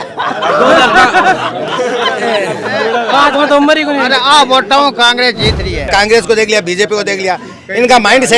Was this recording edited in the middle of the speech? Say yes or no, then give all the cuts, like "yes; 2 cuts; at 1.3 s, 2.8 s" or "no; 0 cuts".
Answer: yes; 1 cut; at 5.9 s